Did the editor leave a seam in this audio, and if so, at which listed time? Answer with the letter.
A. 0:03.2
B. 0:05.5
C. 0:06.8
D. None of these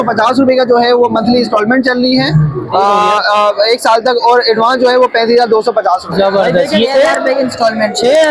C